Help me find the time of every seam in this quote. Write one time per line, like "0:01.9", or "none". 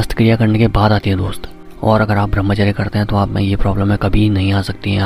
none